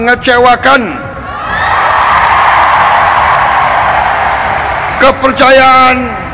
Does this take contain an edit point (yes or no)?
no